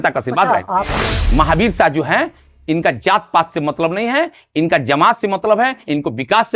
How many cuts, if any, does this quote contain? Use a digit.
1